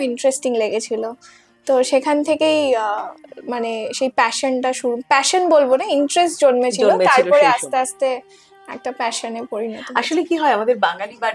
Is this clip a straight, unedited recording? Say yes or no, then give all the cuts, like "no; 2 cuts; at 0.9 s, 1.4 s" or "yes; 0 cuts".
yes; 0 cuts